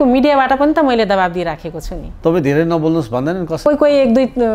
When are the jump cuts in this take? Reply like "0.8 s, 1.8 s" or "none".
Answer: 2.1 s, 3.6 s